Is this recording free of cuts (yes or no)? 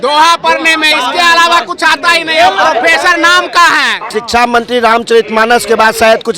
no